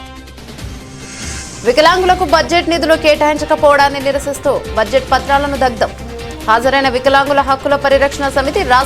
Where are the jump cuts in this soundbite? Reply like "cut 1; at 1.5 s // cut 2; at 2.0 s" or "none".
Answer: cut 1; at 1.1 s